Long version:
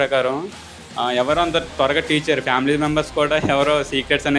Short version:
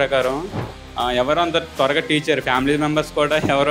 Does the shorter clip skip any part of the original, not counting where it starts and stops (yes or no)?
no